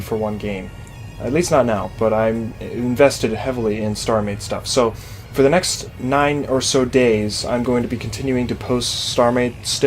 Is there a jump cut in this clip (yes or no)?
yes